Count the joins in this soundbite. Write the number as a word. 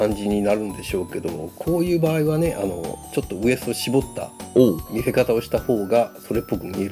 zero